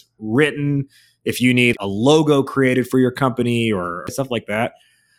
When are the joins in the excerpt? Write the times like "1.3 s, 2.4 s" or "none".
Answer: 1.8 s, 4.2 s